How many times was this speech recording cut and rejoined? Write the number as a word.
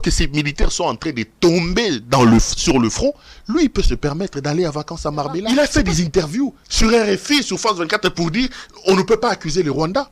one